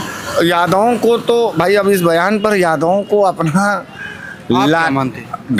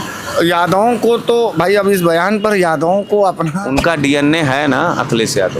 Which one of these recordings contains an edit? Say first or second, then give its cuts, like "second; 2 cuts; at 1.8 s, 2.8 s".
second; 1 cut; at 3.6 s